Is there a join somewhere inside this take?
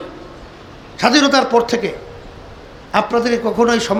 no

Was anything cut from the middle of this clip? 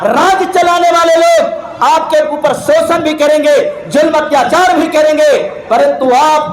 no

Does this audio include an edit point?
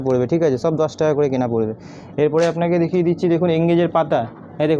no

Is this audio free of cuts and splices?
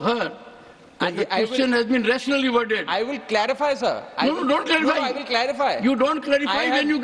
yes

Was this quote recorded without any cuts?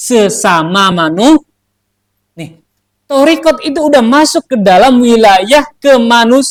yes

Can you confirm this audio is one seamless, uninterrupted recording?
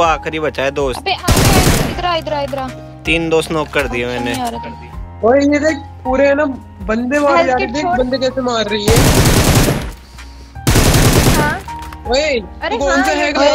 yes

